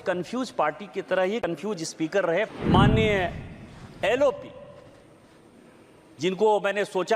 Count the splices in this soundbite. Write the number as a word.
one